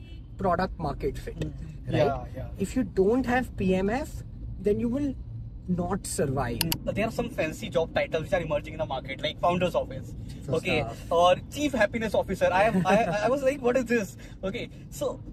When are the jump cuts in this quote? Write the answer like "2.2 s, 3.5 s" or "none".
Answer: 6.7 s